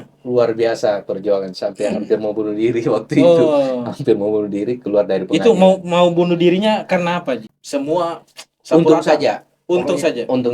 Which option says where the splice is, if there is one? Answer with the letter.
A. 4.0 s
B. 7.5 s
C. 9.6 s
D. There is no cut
B